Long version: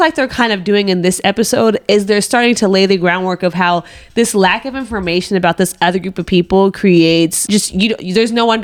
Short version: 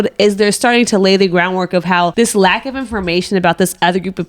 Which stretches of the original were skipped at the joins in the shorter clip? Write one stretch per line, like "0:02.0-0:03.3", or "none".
0:03.8-0:04.1